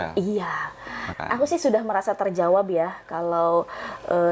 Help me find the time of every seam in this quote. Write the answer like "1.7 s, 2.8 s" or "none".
1.0 s